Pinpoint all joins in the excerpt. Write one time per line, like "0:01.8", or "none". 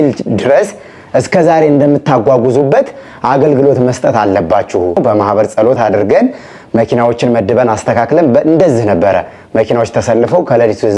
0:05.0